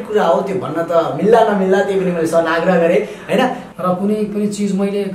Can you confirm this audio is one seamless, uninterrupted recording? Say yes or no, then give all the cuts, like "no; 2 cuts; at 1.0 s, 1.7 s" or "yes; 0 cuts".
no; 1 cut; at 3.6 s